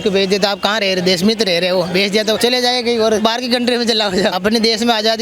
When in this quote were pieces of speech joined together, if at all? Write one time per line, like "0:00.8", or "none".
0:02.4
0:03.2
0:04.4